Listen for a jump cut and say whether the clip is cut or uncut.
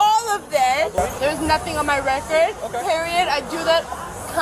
cut